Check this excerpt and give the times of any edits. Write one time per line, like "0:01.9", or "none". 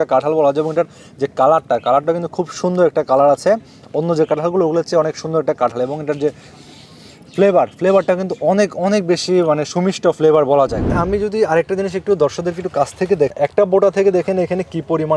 0:10.9
0:13.3